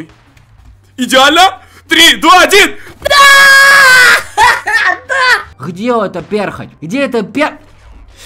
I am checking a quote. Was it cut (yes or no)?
no